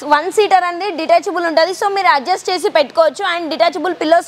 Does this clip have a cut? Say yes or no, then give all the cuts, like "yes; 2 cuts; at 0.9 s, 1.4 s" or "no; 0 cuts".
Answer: no; 0 cuts